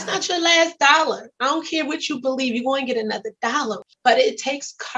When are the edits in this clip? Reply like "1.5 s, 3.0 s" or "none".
3.9 s

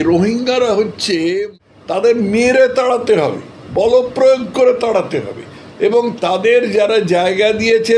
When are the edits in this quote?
1.5 s

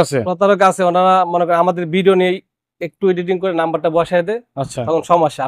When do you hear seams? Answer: none

